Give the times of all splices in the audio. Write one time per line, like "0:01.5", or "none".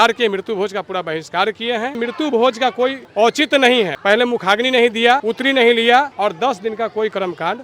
0:02.0
0:05.3
0:06.1